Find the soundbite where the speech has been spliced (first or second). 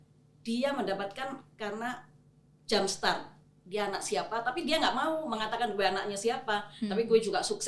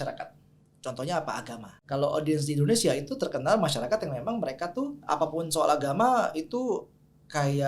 second